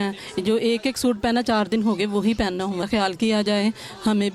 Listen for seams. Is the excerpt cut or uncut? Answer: cut